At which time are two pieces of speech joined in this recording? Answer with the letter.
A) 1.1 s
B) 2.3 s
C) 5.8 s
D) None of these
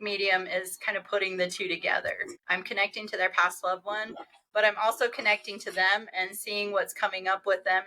B